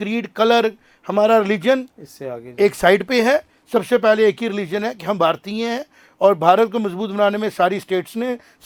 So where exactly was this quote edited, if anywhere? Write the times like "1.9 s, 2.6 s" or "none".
none